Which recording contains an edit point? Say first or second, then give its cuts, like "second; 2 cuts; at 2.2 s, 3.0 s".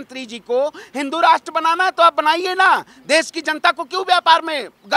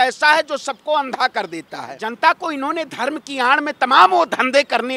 second; 1 cut; at 2.0 s